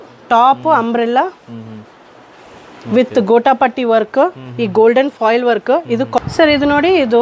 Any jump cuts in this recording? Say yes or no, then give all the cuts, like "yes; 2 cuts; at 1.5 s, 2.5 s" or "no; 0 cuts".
yes; 1 cut; at 6.2 s